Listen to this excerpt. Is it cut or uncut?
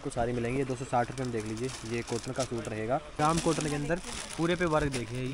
cut